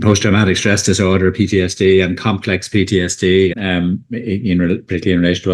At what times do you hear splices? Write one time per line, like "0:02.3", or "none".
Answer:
0:03.5

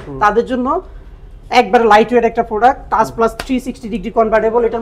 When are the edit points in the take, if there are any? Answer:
none

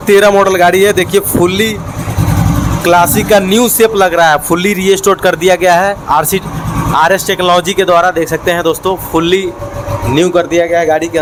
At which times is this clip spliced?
none

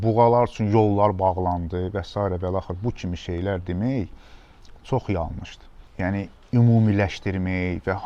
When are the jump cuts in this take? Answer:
none

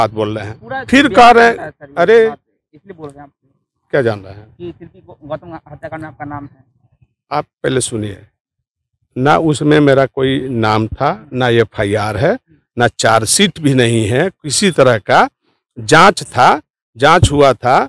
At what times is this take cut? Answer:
none

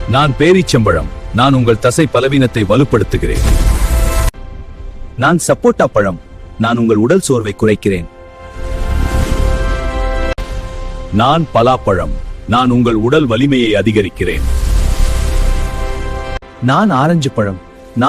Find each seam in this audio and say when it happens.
none

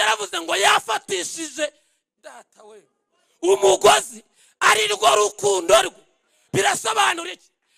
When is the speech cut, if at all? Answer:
none

